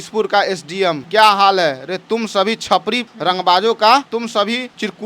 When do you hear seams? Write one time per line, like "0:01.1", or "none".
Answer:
0:01.0
0:03.1
0:04.2